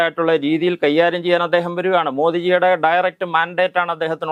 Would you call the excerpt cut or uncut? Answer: uncut